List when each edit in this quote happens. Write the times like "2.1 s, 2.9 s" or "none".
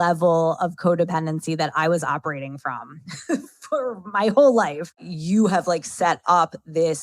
5.1 s